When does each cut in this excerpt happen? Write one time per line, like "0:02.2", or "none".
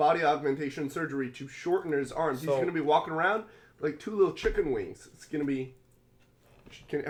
none